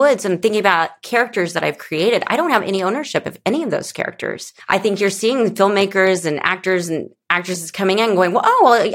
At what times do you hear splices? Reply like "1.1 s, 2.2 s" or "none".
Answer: none